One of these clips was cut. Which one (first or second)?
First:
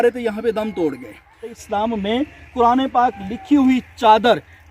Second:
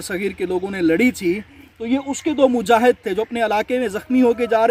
first